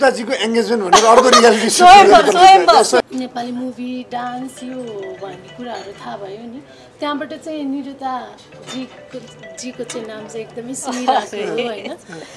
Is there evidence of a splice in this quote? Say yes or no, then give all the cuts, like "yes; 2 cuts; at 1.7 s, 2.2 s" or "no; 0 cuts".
yes; 1 cut; at 3.0 s